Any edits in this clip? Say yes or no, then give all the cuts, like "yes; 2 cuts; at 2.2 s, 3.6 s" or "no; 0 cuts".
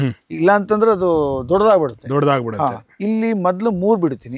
no; 0 cuts